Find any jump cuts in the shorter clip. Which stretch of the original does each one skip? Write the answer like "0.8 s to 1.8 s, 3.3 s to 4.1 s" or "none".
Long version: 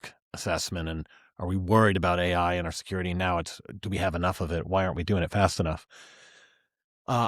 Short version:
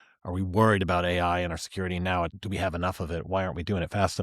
3.5 s to 3.8 s